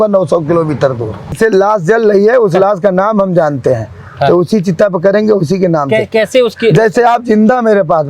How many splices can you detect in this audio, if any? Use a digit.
1